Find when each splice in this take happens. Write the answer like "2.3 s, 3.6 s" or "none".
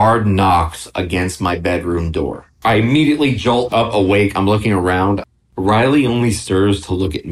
5.3 s